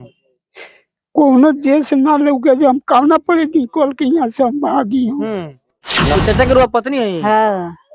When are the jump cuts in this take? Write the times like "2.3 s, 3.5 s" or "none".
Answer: 6.2 s